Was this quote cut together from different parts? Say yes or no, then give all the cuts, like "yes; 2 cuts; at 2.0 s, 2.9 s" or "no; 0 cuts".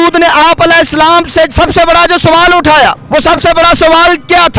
no; 0 cuts